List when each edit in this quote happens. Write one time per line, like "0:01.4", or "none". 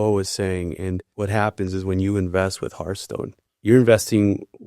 0:01.1
0:03.4